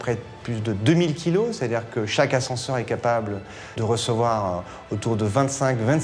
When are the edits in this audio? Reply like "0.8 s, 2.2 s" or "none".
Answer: 3.7 s